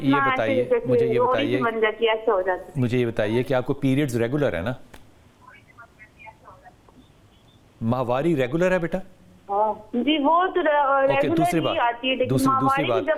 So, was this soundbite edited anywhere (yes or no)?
no